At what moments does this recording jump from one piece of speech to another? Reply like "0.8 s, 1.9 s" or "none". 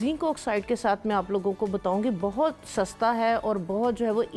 none